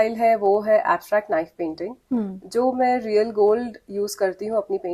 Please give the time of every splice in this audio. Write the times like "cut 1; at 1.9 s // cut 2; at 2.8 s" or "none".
none